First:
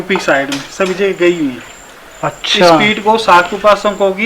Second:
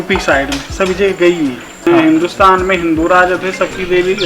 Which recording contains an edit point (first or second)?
second